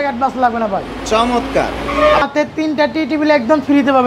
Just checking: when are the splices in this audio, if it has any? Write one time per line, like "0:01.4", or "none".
0:02.2